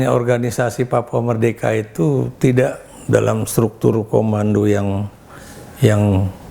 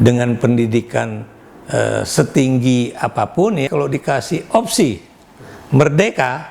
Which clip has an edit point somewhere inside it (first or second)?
second